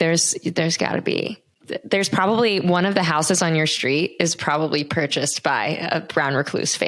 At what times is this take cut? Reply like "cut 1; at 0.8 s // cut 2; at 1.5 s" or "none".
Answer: none